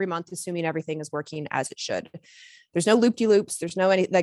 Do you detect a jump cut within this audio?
no; 0 cuts

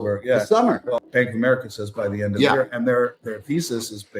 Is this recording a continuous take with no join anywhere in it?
no; 1 cut; at 1.0 s

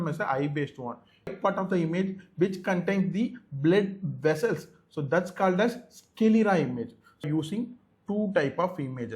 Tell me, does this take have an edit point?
yes; 2 cuts; at 1.3 s, 7.3 s

